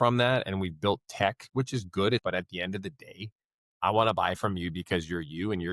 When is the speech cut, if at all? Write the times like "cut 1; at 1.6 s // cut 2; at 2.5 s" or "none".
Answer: cut 1; at 2.2 s

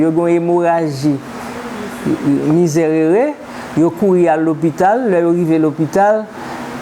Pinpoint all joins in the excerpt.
none

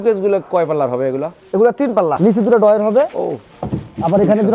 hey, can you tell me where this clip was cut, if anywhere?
cut 1; at 2.2 s

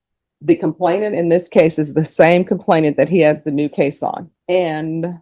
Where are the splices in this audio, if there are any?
cut 1; at 4.3 s

